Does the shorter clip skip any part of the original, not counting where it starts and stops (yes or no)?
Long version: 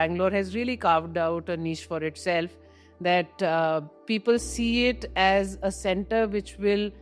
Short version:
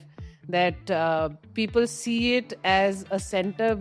no